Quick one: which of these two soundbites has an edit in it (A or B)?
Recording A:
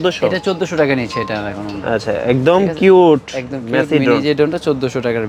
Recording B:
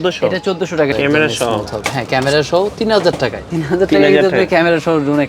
B